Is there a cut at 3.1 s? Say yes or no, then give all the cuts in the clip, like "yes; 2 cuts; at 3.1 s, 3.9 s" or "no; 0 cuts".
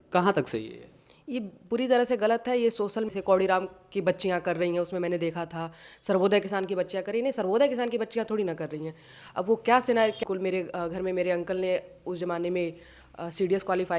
yes; 2 cuts; at 3.1 s, 10.2 s